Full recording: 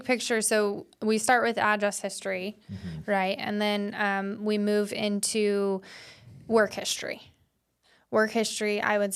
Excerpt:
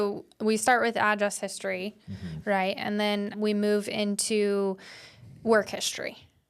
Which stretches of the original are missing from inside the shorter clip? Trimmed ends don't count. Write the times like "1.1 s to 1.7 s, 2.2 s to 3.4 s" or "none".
3.9 s to 4.4 s